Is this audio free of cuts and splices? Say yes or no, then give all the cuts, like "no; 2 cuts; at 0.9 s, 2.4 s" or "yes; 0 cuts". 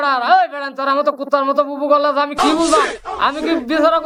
yes; 0 cuts